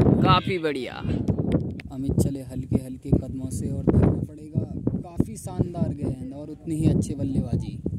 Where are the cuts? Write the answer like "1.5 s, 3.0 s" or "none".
2.1 s